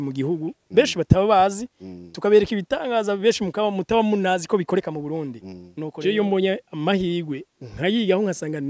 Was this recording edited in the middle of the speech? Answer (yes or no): yes